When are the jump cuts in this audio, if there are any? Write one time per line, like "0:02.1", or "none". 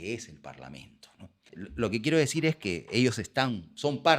0:01.5

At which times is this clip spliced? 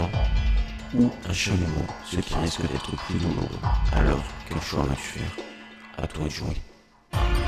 none

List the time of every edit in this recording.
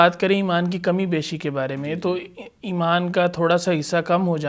none

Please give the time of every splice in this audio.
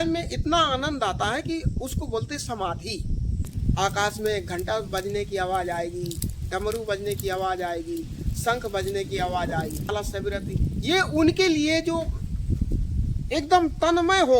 0:03.5
0:09.9

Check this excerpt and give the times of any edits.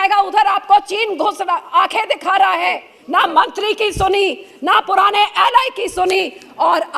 0:02.9

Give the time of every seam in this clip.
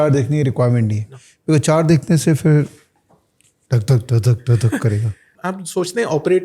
0:05.3

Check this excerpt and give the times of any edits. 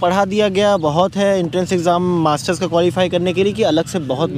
none

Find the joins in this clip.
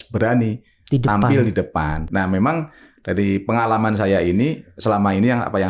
0:02.1

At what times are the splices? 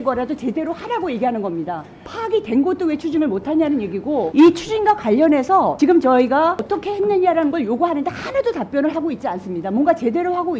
0:02.1
0:06.6

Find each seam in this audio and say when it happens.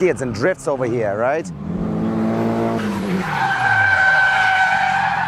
none

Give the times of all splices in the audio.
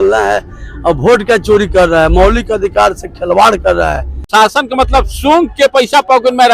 0:04.3

